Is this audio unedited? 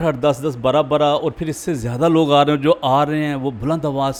yes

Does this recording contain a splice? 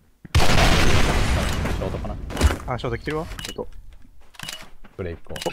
yes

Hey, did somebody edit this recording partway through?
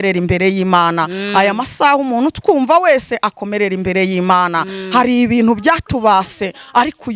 no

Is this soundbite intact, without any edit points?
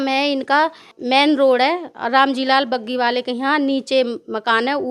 no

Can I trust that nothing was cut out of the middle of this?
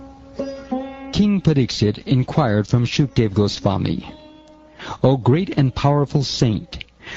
yes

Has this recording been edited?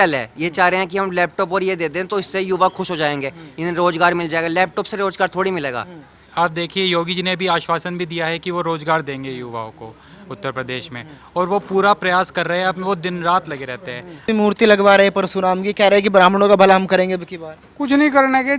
yes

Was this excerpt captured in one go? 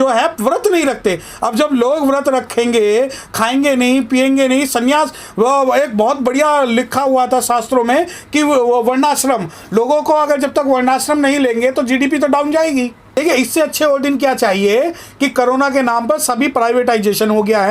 no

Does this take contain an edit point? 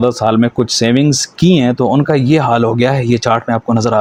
no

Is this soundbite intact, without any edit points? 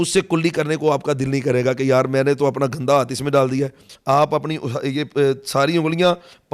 no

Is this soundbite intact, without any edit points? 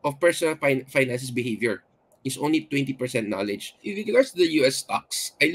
no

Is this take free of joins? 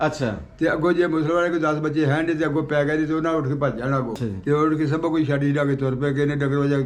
no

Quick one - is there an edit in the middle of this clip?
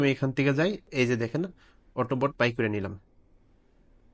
no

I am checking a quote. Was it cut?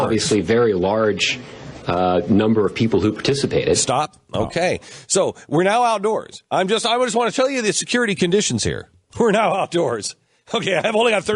no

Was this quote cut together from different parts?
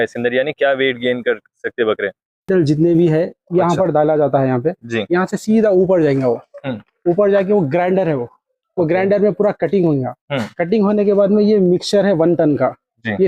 yes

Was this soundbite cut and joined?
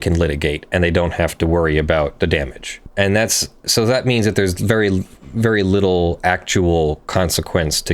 yes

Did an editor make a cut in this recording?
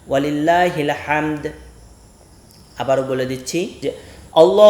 yes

